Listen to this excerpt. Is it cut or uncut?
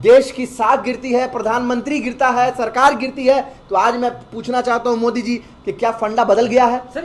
uncut